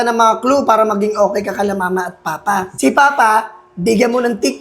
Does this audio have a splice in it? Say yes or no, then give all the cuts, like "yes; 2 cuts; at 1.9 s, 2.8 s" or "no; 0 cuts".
yes; 1 cut; at 2.7 s